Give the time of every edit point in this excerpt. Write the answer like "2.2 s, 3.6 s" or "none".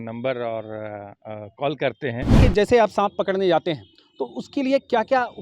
2.4 s